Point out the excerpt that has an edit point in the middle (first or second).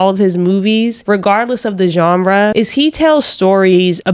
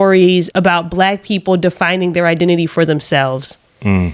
first